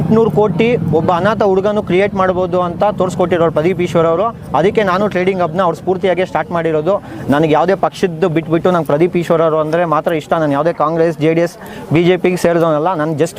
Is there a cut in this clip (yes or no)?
no